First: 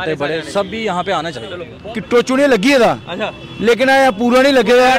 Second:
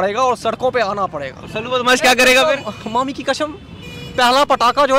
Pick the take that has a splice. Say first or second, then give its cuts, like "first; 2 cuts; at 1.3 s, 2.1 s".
first; 1 cut; at 1.7 s